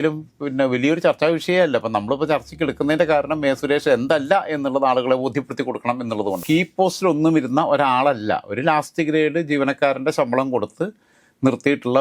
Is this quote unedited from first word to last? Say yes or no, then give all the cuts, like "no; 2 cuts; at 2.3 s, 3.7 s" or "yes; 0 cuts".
no; 1 cut; at 6.4 s